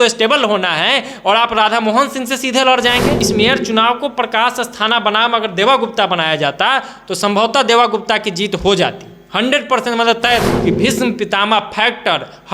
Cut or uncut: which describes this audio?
cut